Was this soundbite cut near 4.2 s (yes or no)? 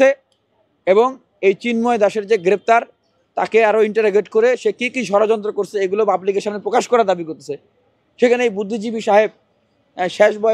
no